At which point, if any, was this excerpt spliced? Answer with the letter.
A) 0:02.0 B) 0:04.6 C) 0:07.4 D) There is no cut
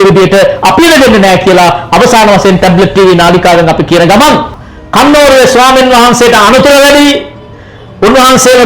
B